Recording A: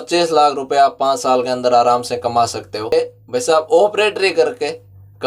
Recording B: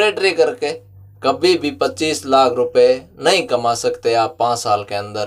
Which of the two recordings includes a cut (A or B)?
A